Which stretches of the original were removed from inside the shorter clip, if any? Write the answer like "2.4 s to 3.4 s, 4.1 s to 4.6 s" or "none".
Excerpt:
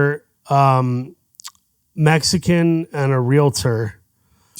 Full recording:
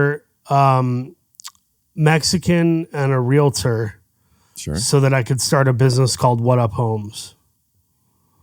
none